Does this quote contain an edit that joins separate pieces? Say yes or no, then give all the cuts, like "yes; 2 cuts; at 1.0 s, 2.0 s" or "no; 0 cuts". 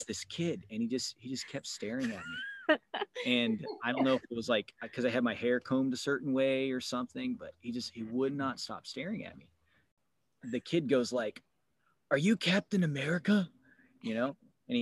yes; 1 cut; at 10.0 s